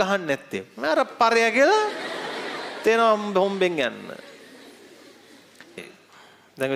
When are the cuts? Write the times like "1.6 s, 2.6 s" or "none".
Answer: 5.7 s